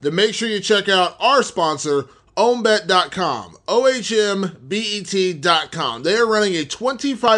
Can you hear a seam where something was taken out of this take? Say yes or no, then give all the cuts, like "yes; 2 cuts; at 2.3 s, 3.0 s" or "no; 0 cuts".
no; 0 cuts